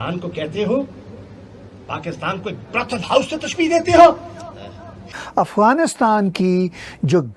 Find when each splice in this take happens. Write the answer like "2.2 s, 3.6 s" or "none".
5.2 s